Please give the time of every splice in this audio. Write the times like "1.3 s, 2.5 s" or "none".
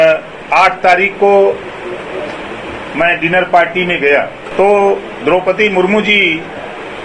4.4 s